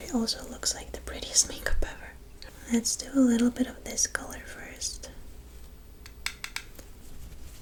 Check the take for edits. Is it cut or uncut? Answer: uncut